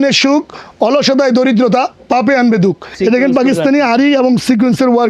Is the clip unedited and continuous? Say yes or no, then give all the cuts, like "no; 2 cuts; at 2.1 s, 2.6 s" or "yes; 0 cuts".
no; 1 cut; at 2.9 s